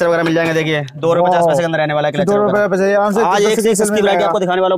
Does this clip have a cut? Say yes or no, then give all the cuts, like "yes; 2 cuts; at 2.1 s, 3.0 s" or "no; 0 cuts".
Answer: no; 0 cuts